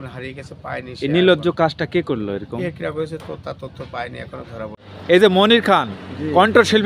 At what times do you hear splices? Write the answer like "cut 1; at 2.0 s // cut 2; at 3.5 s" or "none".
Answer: cut 1; at 4.9 s